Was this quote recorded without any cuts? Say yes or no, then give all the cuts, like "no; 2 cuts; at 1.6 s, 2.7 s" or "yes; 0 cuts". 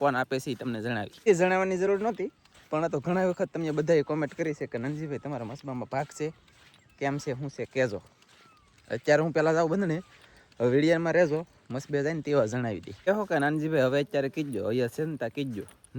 yes; 0 cuts